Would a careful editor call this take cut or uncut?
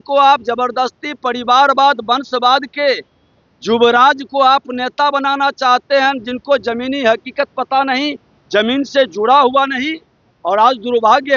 uncut